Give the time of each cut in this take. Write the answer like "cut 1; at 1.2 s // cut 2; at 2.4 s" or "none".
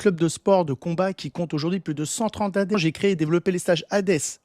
cut 1; at 2.8 s